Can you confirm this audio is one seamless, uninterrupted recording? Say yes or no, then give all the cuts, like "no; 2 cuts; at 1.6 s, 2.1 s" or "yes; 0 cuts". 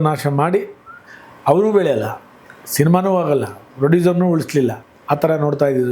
no; 1 cut; at 4.9 s